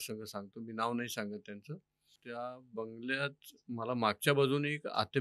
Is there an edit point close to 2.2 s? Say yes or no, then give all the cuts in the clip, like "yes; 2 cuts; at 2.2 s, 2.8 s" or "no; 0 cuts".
yes; 1 cut; at 2.2 s